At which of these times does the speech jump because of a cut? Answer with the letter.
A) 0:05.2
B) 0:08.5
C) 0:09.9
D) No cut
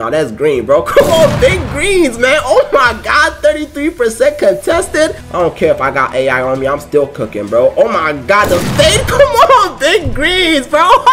A